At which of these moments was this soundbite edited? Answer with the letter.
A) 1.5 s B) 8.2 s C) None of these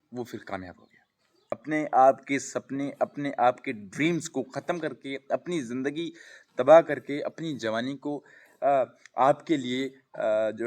A